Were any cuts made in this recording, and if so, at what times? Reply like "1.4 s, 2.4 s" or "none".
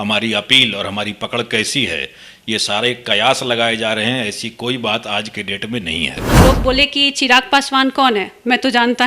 6.4 s